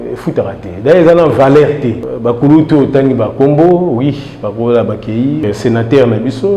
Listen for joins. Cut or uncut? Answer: cut